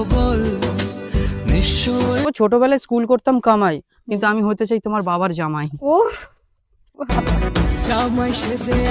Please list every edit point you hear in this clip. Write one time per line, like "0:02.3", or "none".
0:02.3